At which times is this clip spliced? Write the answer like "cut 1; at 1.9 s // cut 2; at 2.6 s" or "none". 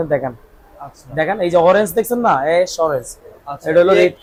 none